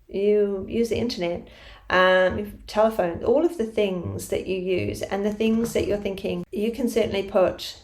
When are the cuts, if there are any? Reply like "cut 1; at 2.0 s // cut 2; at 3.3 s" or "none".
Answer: cut 1; at 6.5 s